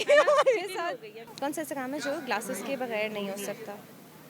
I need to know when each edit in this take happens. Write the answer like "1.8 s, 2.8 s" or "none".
1.3 s